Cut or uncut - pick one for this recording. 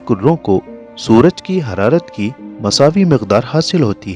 uncut